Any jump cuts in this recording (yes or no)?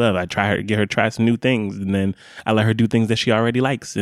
no